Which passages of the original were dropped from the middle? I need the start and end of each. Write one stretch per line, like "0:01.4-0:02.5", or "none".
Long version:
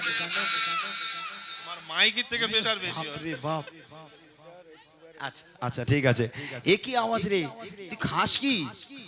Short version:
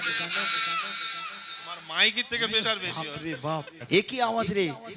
0:03.7-0:06.5